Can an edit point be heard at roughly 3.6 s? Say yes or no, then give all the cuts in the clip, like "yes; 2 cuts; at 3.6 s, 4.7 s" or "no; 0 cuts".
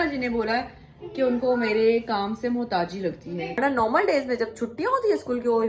yes; 1 cut; at 3.6 s